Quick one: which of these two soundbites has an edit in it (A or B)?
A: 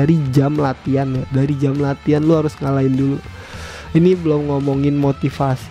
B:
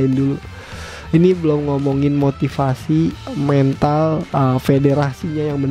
B